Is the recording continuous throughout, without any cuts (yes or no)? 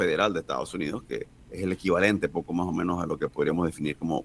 no